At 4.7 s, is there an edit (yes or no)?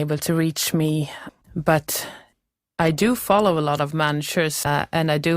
yes